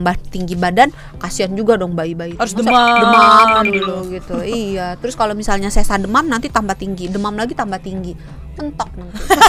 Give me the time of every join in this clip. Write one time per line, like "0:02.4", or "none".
none